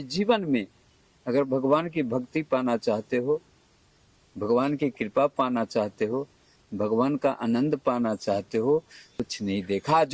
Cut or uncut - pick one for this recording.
cut